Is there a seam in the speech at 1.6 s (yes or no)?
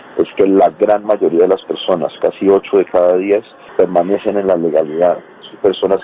no